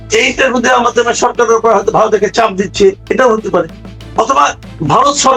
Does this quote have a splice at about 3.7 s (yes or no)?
no